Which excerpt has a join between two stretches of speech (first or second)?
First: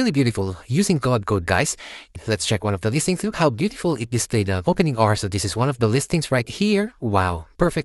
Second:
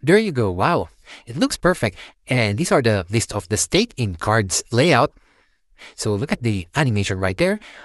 first